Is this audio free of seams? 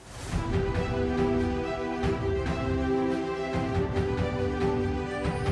yes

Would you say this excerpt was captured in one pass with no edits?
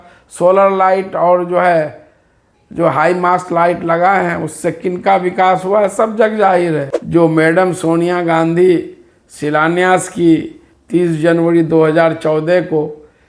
no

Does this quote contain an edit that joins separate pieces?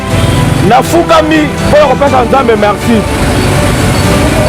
no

